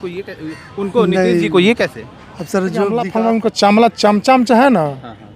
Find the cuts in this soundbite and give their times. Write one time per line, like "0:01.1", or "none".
0:03.0